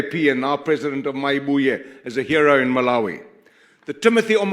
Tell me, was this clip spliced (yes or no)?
no